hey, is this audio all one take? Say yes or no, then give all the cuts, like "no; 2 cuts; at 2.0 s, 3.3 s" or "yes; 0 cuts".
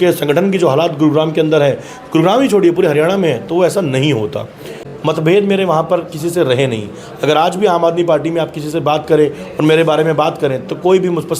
no; 1 cut; at 4.8 s